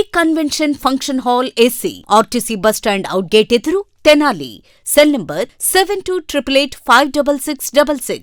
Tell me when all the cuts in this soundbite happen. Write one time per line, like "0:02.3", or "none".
none